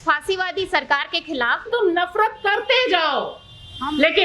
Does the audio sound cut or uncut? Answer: cut